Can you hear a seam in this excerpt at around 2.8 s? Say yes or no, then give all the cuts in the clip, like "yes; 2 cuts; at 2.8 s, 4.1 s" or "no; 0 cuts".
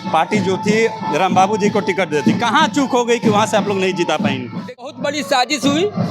no; 1 cut; at 4.9 s